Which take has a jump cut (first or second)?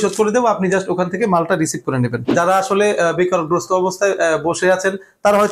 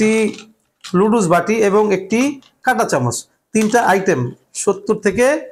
first